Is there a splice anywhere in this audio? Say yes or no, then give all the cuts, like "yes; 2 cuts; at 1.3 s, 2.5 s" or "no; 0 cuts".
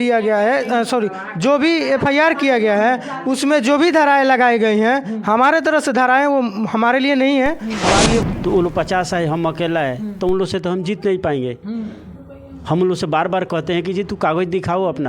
yes; 1 cut; at 8.2 s